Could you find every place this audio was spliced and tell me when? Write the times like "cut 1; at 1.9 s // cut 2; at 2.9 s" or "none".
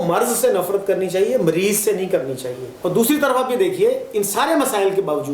cut 1; at 2.7 s